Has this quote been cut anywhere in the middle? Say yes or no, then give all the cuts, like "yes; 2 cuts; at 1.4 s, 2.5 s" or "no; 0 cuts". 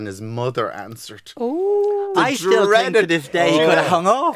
no; 0 cuts